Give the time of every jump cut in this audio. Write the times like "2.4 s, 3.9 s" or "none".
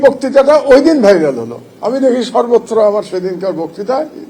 none